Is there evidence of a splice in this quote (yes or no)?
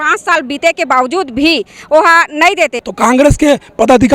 yes